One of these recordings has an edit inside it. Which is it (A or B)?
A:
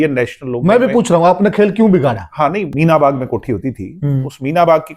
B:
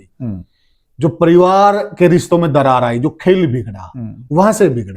A